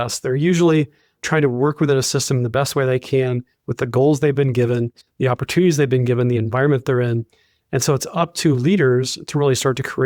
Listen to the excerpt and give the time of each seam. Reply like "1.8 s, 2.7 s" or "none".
1.2 s